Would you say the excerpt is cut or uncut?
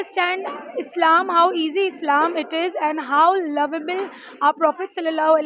uncut